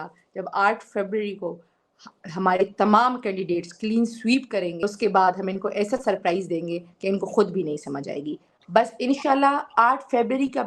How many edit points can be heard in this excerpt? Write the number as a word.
one